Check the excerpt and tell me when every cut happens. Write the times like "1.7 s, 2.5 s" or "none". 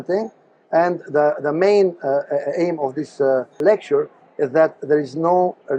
3.6 s